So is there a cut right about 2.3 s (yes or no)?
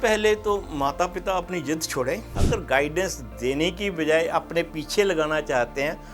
yes